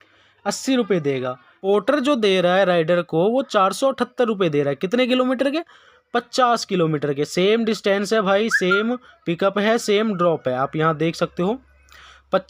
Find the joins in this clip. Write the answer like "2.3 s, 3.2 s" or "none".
1.5 s